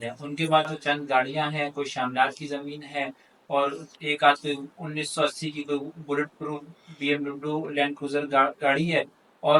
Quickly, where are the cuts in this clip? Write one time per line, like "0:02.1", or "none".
none